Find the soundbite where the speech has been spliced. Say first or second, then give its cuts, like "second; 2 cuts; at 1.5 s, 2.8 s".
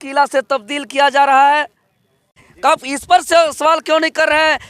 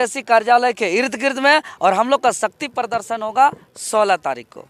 first; 1 cut; at 2.4 s